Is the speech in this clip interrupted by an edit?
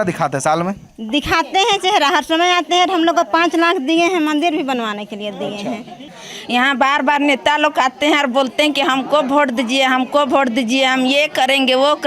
yes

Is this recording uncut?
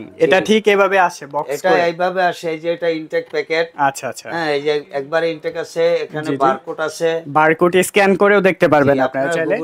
yes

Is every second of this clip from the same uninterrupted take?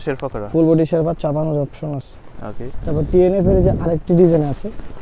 yes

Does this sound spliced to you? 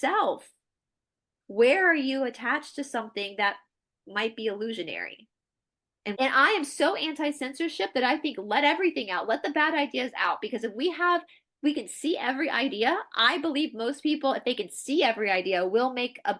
yes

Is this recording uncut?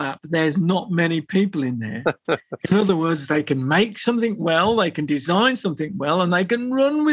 yes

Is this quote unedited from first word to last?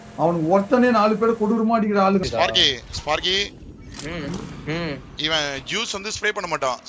no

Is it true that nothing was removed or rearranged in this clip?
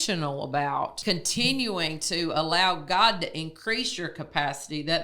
no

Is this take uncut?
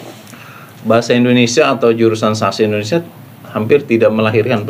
yes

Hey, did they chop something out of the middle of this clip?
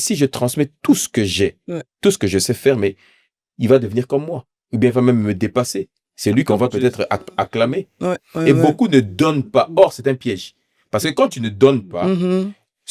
no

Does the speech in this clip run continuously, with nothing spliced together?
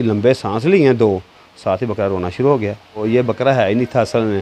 no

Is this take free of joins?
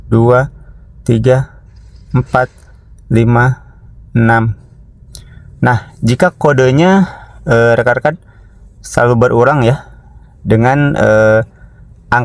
yes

